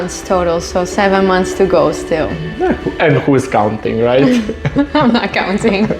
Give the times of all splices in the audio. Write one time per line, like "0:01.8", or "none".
none